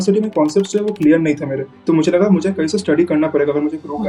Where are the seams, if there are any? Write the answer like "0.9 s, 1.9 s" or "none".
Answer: none